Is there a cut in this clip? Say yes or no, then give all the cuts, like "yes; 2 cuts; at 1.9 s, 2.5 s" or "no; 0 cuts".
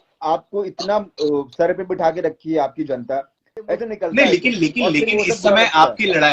yes; 1 cut; at 3.8 s